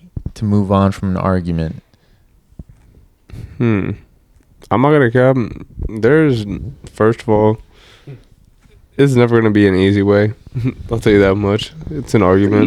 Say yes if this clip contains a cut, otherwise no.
no